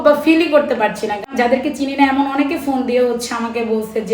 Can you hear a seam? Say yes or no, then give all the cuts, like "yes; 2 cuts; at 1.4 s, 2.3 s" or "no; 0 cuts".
yes; 1 cut; at 1.3 s